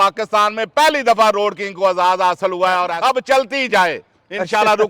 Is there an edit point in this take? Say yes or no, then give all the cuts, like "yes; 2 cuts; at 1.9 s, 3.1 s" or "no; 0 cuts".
yes; 1 cut; at 2.9 s